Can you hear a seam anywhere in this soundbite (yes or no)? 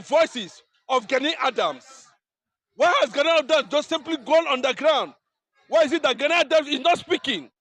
no